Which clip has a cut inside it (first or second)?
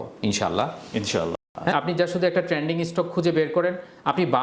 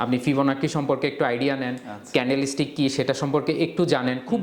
first